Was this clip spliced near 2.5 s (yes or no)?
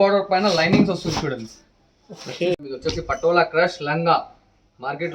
yes